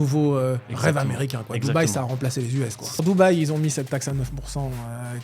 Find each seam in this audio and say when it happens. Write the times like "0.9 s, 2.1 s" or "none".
3.0 s